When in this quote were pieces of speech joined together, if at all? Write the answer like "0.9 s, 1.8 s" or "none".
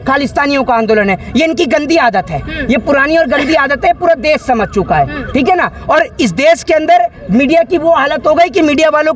none